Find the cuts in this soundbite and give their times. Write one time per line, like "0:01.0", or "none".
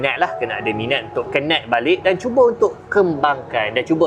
none